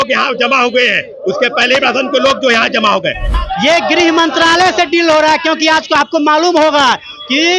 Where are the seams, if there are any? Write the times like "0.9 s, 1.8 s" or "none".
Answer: 3.3 s

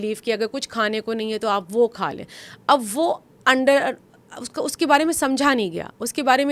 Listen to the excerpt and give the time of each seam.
none

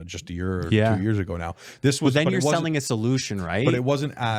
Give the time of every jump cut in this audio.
none

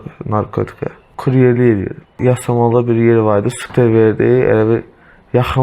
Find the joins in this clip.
1.1 s, 2.2 s, 3.6 s

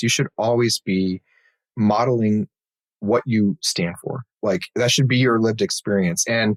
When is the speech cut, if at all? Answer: none

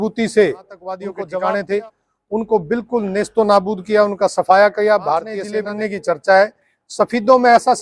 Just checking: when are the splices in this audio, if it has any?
1.1 s, 5.5 s

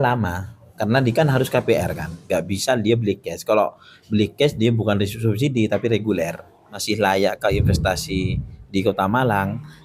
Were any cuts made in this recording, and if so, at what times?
6.7 s

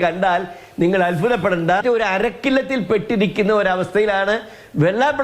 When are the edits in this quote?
1.8 s

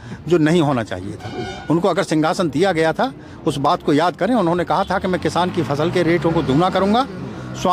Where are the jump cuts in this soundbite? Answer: none

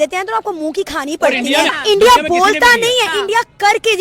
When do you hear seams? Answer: 1.8 s

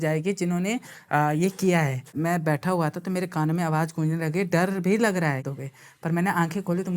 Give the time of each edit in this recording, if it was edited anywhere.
2.1 s, 5.5 s

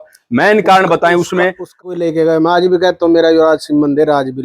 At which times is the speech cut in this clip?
1.9 s

